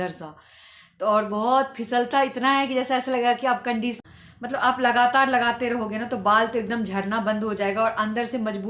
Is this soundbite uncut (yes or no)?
no